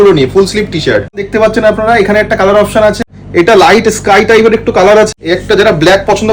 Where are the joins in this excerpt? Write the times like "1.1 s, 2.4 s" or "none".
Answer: 1.2 s, 3.1 s, 5.1 s